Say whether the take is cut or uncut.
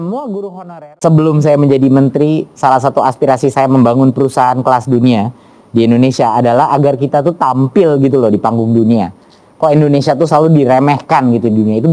cut